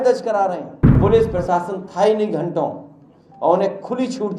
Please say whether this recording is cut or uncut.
cut